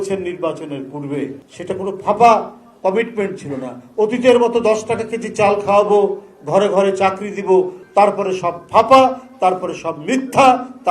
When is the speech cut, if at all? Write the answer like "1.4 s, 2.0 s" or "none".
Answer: 1.5 s, 7.8 s